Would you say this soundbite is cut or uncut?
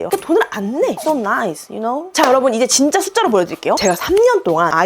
cut